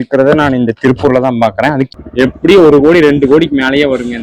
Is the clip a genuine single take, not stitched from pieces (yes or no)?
no